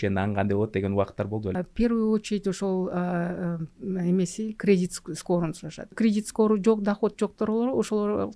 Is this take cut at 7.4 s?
no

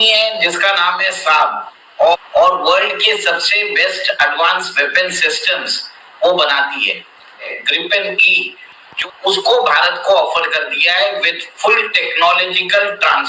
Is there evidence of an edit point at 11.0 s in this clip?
no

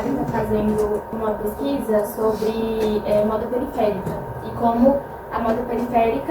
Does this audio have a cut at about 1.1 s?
yes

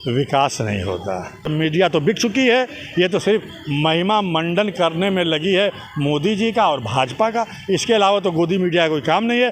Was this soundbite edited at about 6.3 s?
no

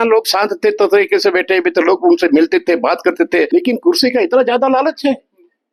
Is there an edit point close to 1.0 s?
no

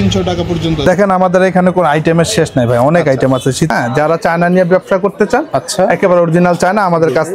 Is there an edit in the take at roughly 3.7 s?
yes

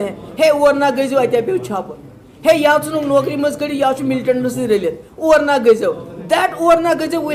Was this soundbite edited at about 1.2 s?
no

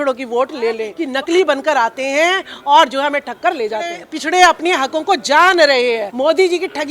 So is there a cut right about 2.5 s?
no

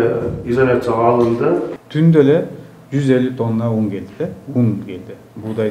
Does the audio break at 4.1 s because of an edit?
no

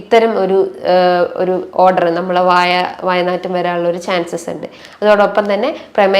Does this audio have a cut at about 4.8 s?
yes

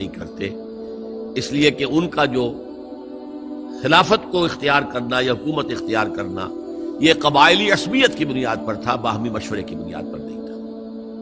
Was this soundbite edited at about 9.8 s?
yes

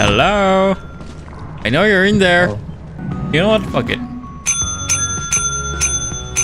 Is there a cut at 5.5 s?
no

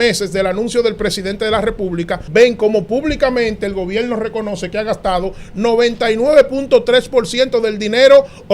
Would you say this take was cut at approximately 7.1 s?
no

